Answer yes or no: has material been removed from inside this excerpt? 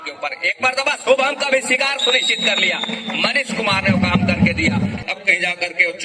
yes